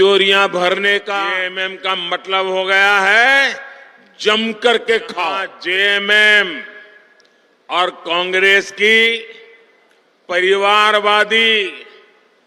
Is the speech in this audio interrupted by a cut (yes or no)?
yes